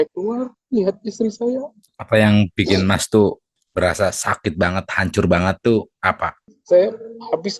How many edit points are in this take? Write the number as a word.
one